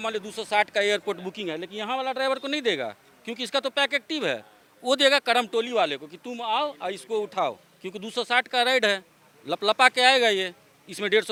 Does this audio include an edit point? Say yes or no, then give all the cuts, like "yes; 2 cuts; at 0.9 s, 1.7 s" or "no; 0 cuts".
no; 0 cuts